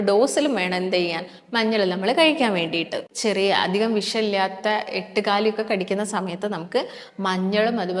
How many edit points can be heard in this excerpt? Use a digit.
1